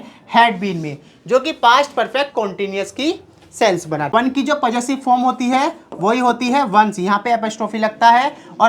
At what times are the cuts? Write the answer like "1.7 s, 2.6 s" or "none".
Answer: 4.1 s

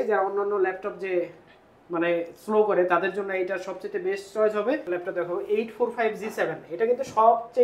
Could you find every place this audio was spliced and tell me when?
4.9 s

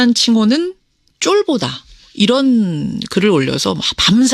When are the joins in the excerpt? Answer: 1.5 s

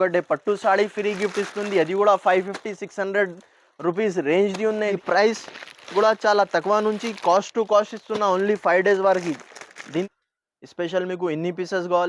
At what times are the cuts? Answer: 5.0 s, 10.0 s

